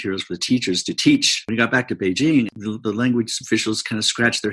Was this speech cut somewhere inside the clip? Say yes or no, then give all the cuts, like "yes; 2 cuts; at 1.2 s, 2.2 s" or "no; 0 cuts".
yes; 2 cuts; at 1.3 s, 2.5 s